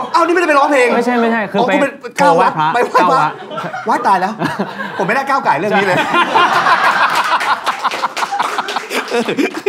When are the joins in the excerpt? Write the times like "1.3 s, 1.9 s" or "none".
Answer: none